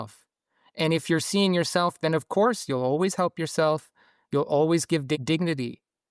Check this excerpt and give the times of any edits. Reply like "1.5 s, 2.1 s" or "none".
5.2 s